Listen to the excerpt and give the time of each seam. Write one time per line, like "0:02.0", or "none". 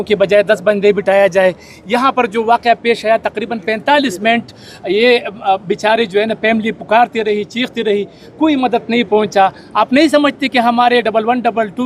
none